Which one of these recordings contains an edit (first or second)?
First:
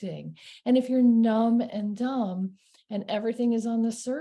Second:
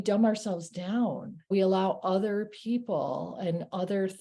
second